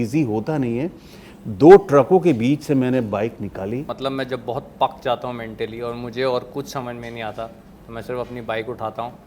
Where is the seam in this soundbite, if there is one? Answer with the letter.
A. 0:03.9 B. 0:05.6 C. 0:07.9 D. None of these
A